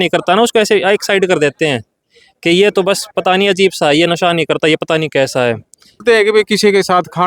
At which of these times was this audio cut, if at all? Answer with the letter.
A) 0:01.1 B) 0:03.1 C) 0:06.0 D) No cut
C